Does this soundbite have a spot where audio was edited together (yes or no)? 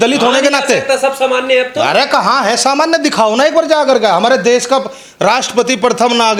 no